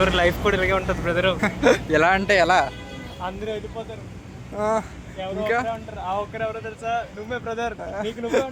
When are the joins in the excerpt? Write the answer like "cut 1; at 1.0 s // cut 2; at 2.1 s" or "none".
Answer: none